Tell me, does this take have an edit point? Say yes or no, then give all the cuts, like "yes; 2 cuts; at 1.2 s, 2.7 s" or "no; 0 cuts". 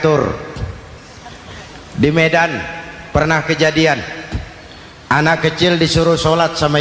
no; 0 cuts